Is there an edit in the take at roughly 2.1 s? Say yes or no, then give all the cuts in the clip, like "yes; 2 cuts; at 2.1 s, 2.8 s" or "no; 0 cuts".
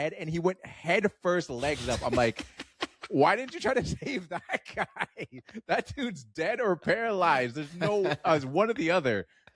no; 0 cuts